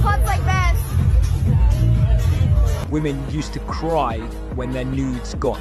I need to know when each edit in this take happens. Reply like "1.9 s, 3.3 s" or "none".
none